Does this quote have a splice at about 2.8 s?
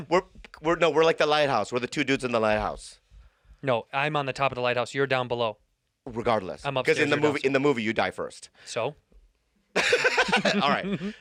no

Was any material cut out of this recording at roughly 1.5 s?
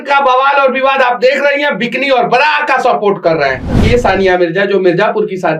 no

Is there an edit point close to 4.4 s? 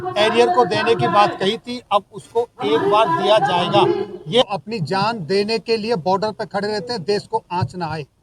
yes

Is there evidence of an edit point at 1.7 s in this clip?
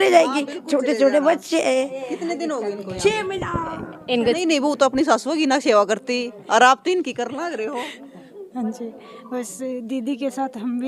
no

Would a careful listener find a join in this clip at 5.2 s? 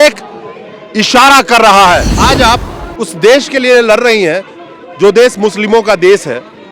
no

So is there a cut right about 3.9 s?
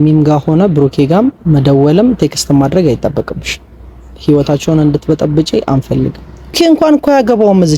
no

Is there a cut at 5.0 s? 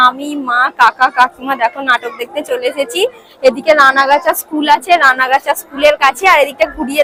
no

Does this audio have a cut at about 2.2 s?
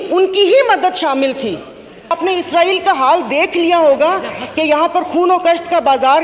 yes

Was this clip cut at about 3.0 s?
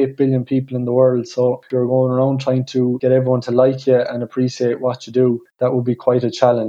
yes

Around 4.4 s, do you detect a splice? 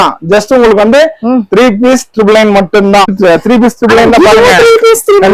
no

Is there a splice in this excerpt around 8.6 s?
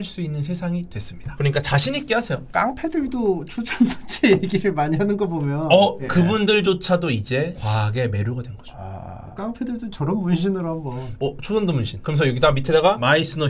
no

